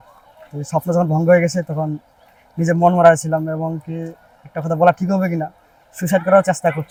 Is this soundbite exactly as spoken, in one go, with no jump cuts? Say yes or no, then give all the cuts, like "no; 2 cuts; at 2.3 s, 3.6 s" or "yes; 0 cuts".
yes; 0 cuts